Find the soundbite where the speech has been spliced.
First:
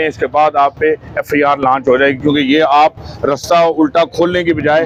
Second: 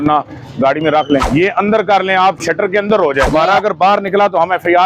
second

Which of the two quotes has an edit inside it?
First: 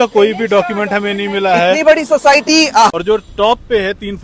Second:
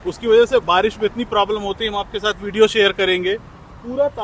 first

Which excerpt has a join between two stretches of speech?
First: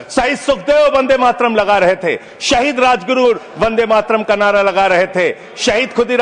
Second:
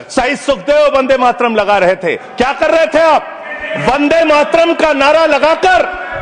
second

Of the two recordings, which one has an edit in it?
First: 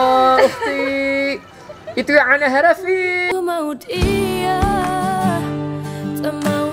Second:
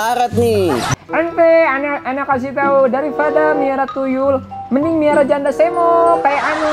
second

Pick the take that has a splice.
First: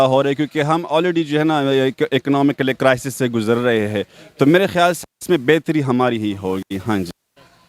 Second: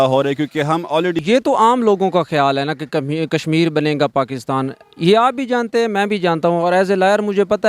second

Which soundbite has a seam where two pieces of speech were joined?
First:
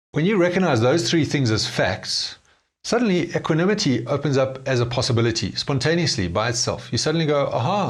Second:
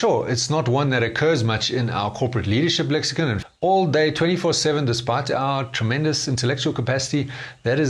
second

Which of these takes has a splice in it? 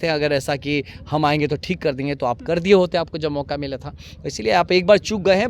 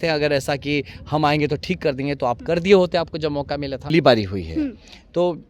second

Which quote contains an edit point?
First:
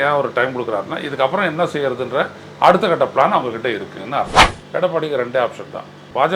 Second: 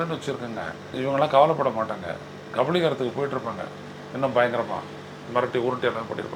first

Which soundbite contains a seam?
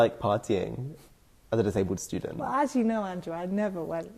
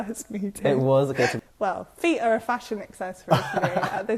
second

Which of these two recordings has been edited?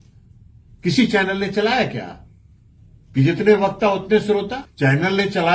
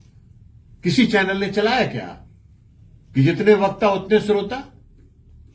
first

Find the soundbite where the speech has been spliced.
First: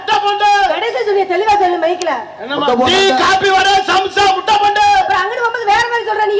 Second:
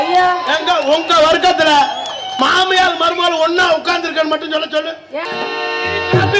second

